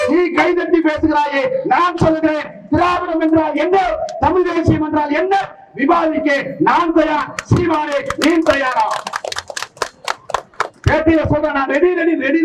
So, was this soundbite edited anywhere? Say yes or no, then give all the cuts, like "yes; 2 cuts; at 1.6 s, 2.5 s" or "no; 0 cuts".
no; 0 cuts